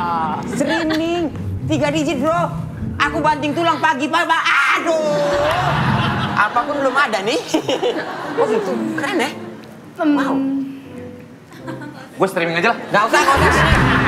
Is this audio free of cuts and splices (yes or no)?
yes